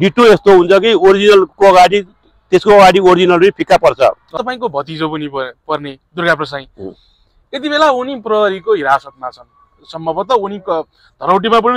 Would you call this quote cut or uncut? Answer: cut